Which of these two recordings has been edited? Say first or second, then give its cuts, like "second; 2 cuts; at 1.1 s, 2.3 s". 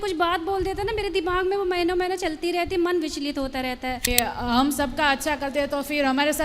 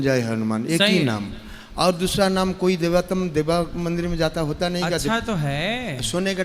first; 1 cut; at 4.1 s